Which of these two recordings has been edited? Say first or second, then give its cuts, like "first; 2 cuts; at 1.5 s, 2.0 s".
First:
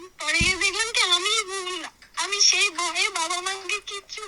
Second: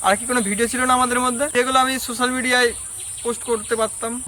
second; 1 cut; at 1.5 s